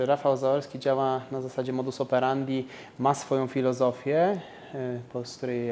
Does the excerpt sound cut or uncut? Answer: uncut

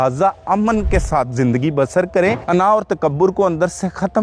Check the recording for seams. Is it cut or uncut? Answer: cut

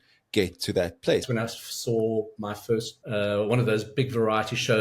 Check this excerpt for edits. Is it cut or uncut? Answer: cut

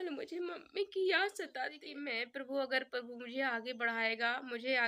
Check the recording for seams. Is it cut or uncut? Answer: cut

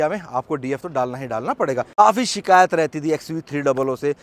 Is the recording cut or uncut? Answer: uncut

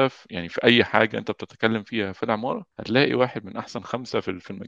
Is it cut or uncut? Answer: cut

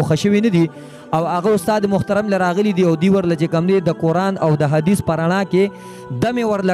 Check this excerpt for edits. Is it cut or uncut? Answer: uncut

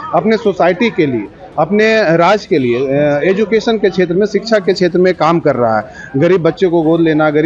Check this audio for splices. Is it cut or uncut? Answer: uncut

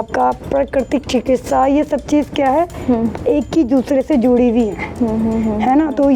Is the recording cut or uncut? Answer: uncut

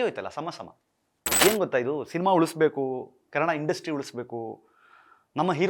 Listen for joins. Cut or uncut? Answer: cut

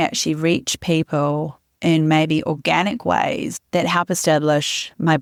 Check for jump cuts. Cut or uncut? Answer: uncut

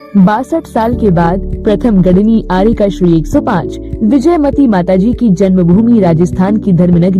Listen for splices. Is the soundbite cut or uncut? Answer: cut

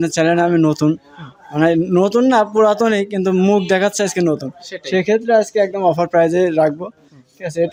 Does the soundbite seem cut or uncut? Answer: uncut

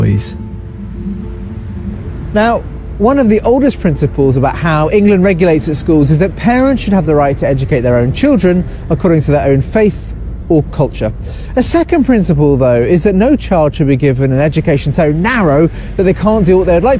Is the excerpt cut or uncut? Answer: cut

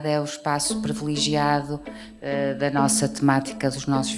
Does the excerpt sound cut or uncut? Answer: uncut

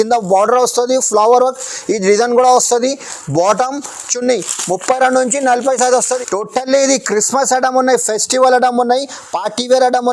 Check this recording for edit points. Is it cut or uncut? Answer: cut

